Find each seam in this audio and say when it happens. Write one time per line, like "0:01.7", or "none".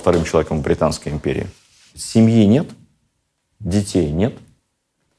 0:01.8